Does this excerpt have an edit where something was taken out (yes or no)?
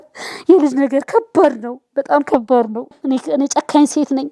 yes